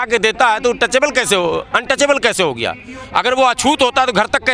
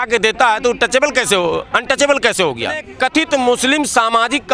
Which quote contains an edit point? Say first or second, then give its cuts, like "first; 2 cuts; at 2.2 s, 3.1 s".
second; 1 cut; at 2.9 s